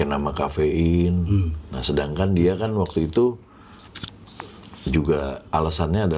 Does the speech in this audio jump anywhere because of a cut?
no; 0 cuts

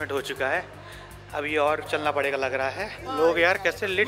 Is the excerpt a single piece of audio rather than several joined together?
no; 1 cut; at 3.0 s

